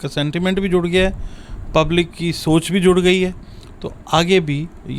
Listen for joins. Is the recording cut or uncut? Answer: uncut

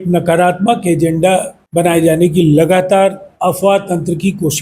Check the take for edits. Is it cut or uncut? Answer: cut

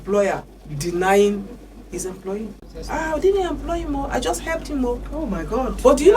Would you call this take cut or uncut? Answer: cut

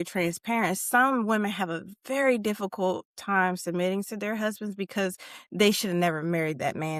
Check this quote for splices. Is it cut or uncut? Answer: uncut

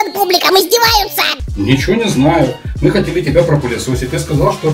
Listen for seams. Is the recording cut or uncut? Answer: cut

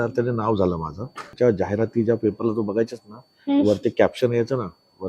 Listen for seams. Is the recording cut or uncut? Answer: cut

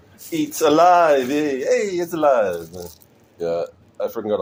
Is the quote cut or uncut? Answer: uncut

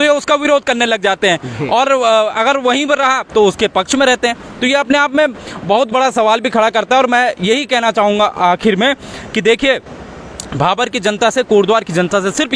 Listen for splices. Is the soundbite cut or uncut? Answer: uncut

